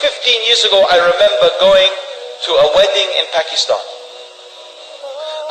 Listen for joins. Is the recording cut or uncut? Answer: uncut